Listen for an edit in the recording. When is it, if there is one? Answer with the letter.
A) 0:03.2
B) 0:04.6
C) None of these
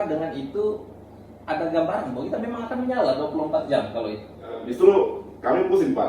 B